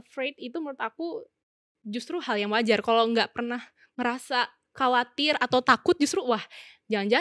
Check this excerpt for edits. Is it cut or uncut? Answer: uncut